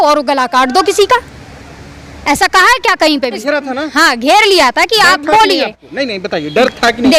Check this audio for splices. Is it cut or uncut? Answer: cut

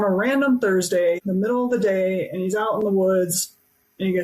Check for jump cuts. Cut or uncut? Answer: cut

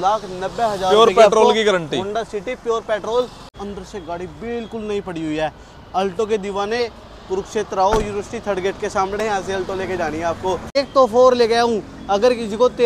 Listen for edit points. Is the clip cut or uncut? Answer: cut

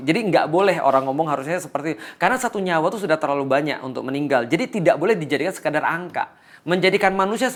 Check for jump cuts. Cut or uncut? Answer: uncut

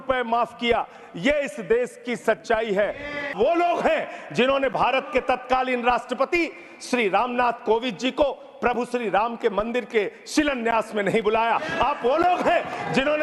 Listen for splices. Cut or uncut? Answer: cut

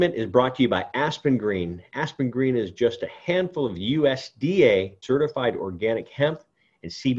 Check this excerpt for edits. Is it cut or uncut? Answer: cut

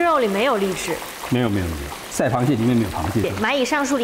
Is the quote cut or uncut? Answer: cut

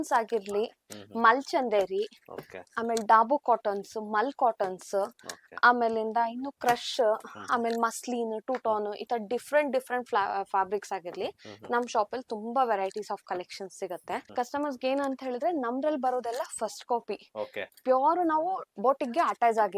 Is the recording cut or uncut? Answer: cut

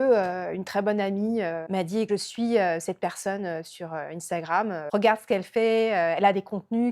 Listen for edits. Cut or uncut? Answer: cut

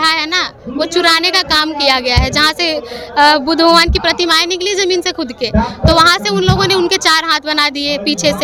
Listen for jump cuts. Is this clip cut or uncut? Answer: uncut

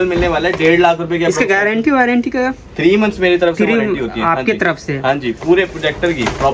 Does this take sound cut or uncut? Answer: uncut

